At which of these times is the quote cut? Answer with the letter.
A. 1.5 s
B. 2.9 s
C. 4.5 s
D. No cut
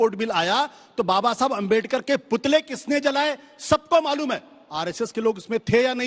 D